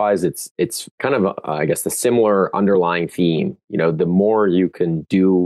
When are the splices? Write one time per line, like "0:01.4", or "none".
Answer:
0:01.0